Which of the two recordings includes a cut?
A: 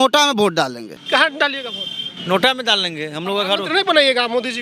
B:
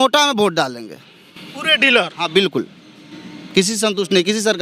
A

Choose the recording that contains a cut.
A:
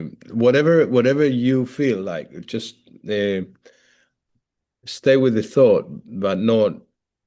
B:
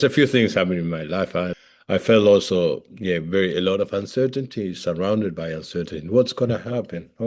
B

